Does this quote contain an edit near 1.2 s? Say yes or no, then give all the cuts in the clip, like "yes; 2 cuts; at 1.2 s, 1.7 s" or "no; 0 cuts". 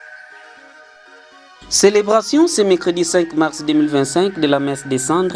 yes; 1 cut; at 1.2 s